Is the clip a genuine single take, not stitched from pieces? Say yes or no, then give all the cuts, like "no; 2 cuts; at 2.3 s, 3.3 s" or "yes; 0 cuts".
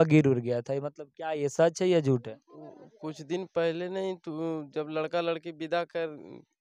yes; 0 cuts